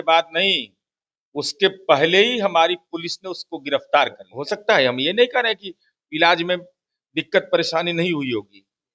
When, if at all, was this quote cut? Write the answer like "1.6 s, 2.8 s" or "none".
4.3 s